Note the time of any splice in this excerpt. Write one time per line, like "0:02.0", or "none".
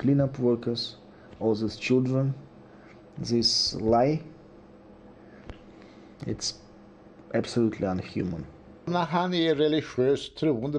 0:08.9